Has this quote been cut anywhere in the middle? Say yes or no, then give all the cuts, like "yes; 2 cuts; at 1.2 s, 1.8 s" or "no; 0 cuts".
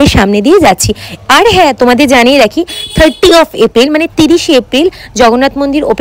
no; 0 cuts